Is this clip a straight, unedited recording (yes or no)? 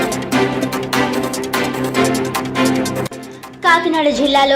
no